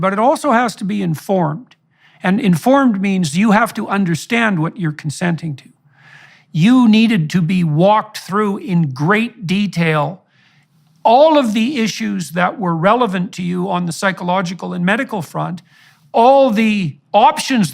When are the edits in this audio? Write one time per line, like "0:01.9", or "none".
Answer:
0:06.2